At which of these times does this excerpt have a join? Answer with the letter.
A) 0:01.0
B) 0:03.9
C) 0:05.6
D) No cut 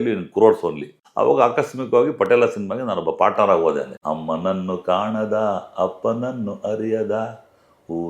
B